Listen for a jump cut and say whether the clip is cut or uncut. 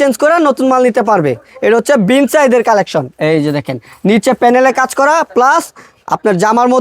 uncut